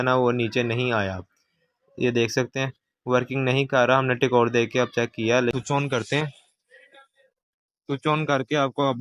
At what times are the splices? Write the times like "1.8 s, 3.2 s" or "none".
5.5 s